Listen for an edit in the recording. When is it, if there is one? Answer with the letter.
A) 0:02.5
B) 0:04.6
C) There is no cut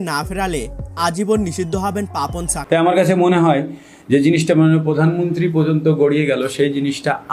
A